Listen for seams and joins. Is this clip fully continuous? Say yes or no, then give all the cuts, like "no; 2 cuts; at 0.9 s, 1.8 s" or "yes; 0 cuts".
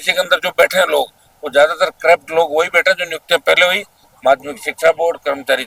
yes; 0 cuts